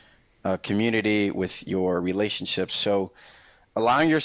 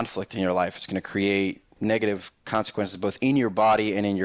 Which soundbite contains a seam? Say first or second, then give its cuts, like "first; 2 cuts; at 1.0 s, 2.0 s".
second; 1 cut; at 1.7 s